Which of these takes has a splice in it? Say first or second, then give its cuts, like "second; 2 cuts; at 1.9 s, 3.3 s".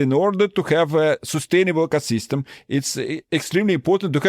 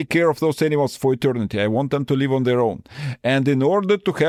first; 1 cut; at 3.2 s